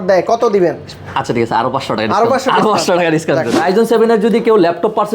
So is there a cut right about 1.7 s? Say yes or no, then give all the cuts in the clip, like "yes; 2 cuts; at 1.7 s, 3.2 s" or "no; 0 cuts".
no; 1 cut; at 3.5 s